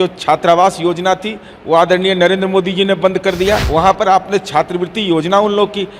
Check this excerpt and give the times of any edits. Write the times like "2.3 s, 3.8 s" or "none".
3.7 s